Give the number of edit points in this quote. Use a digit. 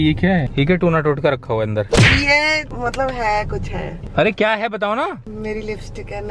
1